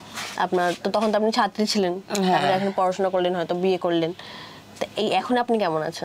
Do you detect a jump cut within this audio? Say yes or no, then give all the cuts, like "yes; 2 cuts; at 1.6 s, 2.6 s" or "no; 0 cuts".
no; 0 cuts